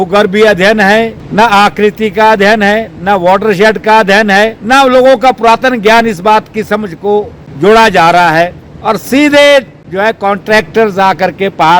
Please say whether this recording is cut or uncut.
cut